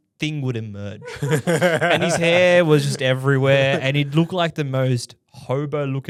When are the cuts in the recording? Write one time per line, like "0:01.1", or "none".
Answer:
none